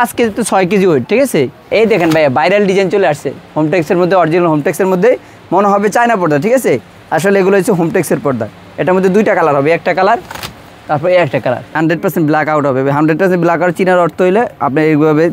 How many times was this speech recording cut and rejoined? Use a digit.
2